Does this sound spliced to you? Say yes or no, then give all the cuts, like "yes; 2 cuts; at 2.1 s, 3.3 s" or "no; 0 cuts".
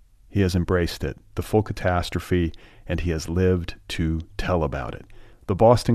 no; 0 cuts